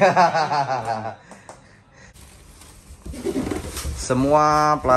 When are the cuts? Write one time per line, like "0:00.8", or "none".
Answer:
0:02.1